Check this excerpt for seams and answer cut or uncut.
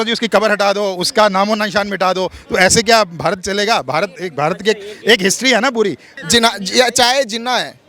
cut